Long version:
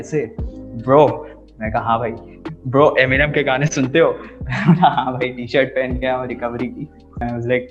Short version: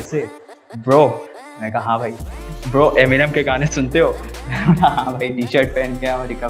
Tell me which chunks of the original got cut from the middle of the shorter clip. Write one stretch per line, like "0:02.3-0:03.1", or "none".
none